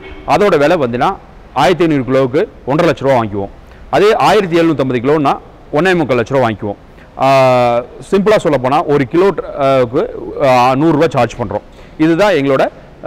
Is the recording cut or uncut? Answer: uncut